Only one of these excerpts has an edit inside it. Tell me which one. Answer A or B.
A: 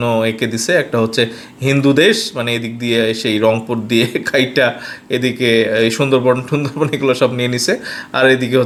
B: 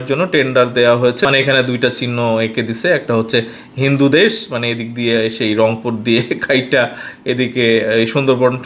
B